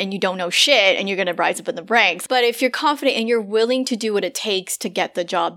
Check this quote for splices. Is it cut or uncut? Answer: cut